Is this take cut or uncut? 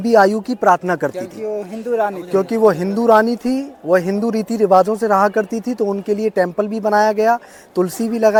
uncut